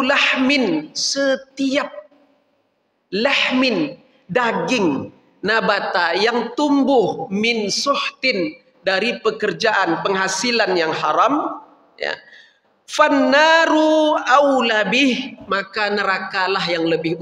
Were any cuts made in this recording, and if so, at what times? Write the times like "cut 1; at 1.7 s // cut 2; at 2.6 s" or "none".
none

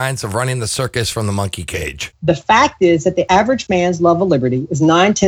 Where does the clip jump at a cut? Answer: cut 1; at 2.1 s // cut 2; at 3.3 s

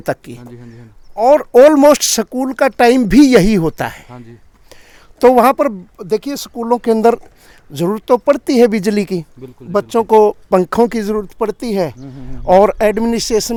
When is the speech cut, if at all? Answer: none

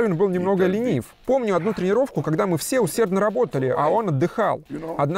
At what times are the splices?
cut 1; at 1.1 s

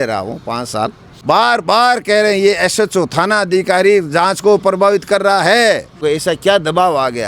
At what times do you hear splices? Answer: cut 1; at 1.1 s // cut 2; at 6.0 s

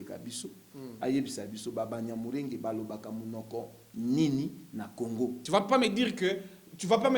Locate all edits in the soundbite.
cut 1; at 5.4 s

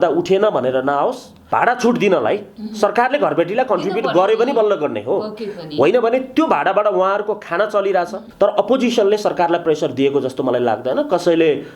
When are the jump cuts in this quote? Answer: cut 1; at 1.3 s // cut 2; at 8.2 s

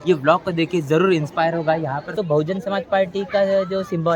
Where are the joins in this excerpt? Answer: cut 1; at 2.1 s

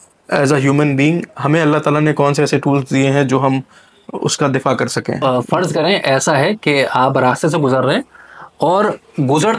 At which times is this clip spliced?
cut 1; at 5.2 s

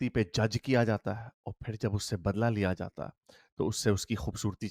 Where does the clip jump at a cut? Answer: none

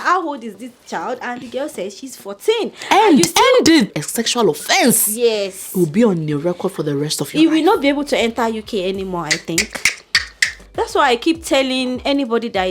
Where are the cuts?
cut 1; at 3.9 s // cut 2; at 10.5 s

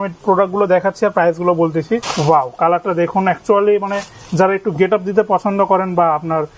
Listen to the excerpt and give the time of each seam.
cut 1; at 2.1 s

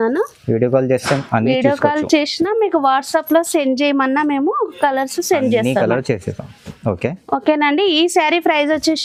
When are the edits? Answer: none

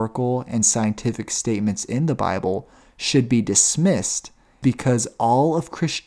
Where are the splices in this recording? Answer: cut 1; at 4.6 s

